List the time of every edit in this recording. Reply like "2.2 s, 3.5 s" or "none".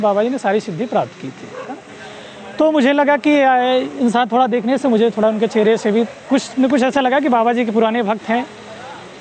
1.9 s